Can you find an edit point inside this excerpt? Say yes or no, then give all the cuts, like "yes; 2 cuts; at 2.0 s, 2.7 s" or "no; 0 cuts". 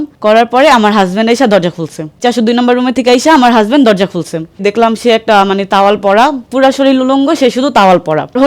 no; 0 cuts